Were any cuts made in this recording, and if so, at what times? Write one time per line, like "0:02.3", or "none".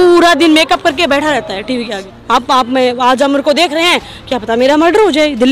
0:02.1

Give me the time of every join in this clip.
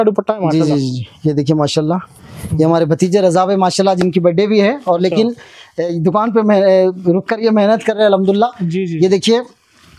none

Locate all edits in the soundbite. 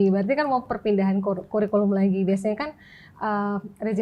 none

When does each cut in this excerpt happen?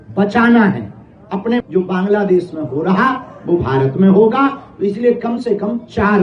0:01.6

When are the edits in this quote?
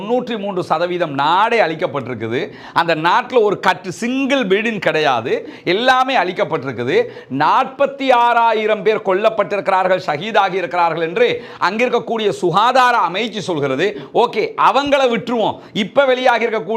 none

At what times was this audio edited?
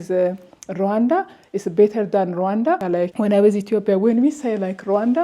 0:02.8

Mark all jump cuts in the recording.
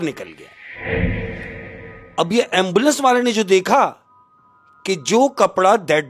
none

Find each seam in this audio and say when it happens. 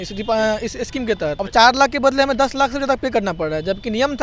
0:01.4

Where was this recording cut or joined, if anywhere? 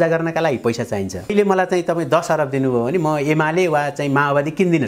0:01.3

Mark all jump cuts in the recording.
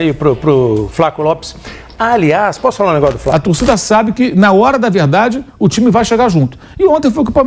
0:03.2

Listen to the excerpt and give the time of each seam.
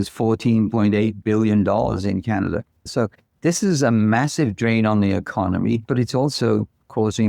0:02.9
0:05.8

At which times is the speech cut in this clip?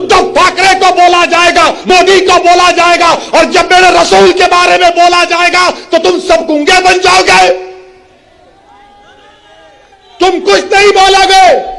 0:01.8

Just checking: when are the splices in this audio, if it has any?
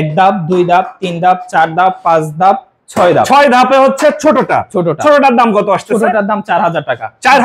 none

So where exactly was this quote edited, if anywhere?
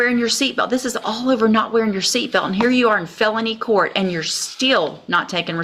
none

